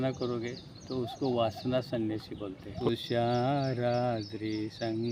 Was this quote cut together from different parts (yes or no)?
yes